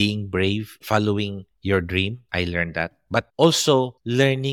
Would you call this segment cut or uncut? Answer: uncut